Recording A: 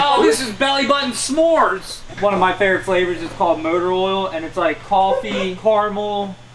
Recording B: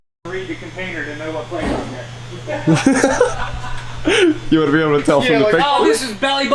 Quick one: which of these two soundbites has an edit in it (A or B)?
A